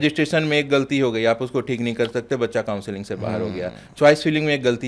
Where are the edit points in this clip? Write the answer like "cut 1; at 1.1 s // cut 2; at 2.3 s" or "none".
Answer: none